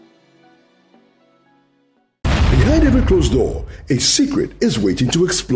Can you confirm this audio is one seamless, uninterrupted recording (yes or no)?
no